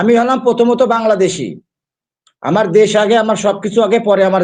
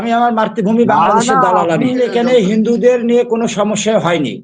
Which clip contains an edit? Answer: second; 1 cut; at 2.0 s

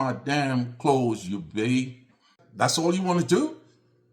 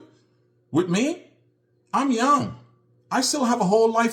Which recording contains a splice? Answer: first; 1 cut; at 2.4 s

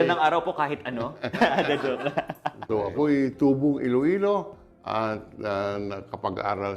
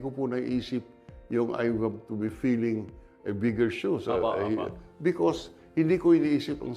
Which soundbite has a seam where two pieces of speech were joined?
first; 1 cut; at 2.5 s

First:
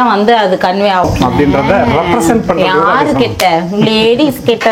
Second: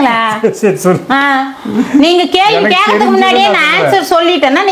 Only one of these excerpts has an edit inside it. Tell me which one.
first; 1 cut; at 1.0 s

